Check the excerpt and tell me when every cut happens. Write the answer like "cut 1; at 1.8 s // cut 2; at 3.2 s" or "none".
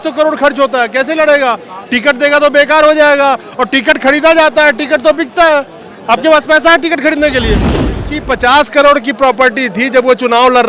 cut 1; at 7.9 s